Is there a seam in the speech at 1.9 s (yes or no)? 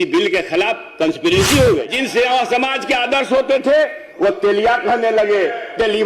yes